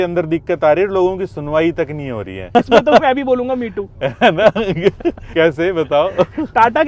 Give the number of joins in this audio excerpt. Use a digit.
2